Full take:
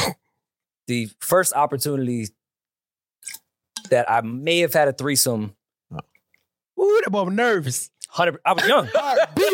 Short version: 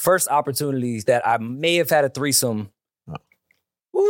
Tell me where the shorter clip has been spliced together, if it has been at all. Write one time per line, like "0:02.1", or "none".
0:01.0